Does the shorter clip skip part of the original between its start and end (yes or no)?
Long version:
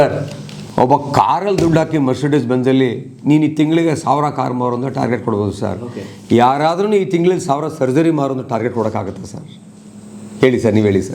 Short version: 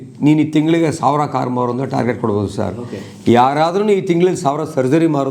no